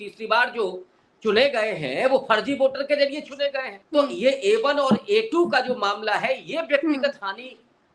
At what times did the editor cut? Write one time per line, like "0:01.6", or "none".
0:03.7